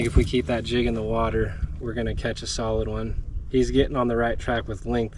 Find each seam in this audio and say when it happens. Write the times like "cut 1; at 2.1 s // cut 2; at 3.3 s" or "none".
none